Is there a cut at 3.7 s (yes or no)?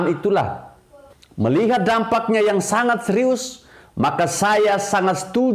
no